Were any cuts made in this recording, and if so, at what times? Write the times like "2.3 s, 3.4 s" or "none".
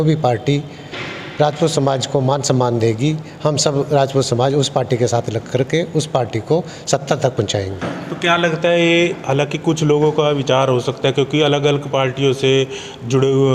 none